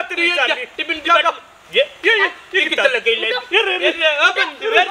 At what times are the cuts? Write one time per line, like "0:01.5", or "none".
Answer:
none